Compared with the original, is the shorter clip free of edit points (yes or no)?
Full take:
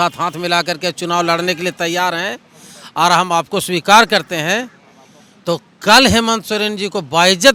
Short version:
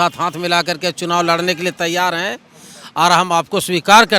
yes